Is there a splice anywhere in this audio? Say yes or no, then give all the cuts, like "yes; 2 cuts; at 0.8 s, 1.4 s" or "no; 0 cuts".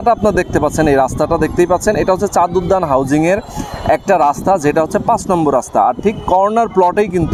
no; 0 cuts